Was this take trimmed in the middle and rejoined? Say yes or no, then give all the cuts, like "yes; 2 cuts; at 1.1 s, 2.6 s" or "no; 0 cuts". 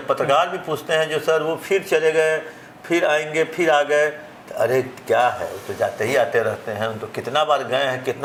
no; 0 cuts